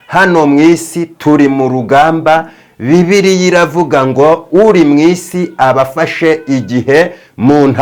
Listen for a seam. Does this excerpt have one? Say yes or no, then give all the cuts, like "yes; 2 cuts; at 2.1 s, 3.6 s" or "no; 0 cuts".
no; 0 cuts